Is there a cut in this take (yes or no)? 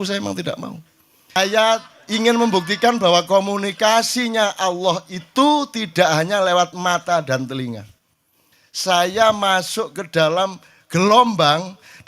yes